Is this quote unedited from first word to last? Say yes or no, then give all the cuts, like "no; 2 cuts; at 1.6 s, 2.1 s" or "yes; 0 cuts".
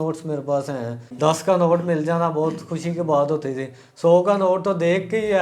no; 1 cut; at 1.1 s